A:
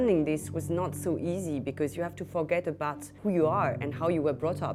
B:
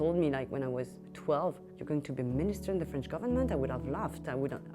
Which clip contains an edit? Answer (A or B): B